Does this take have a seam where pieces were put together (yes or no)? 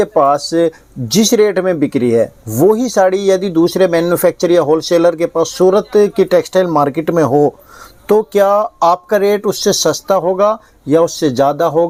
no